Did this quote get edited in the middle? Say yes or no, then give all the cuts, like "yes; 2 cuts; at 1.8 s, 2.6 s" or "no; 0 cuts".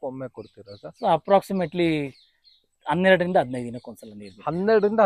no; 0 cuts